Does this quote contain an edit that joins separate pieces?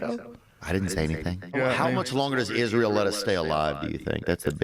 yes; 1 cut; at 1.5 s

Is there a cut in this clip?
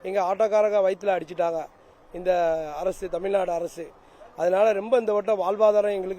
no; 0 cuts

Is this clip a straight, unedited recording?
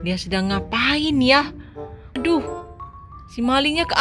no; 1 cut; at 2.2 s

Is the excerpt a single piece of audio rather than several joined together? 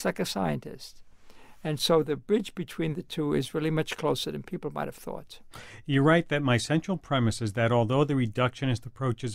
no; 1 cut; at 1.5 s

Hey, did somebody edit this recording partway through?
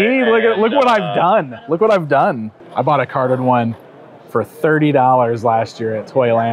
yes; 1 cut; at 2.5 s

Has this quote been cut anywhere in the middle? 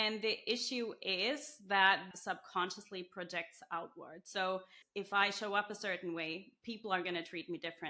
yes; 2 cuts; at 2.1 s, 4.8 s

